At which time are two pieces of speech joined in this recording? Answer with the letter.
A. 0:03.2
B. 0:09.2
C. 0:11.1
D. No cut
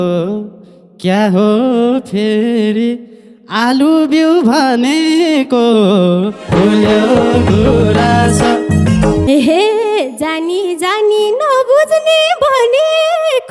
B